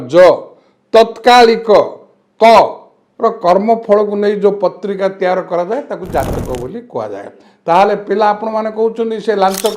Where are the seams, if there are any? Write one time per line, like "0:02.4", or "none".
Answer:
none